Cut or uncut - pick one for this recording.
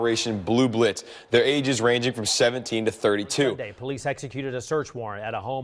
cut